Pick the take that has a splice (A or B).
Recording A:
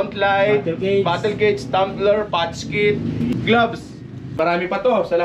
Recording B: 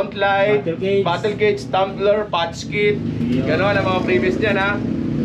A